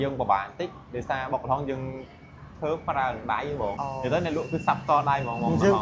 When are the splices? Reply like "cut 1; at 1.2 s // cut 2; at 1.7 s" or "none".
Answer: cut 1; at 3.8 s